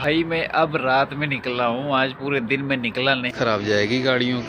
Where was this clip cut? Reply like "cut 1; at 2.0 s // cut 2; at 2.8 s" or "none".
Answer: cut 1; at 3.3 s